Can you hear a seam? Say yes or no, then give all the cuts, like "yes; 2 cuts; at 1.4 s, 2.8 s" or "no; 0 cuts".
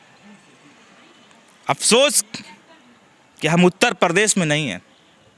no; 0 cuts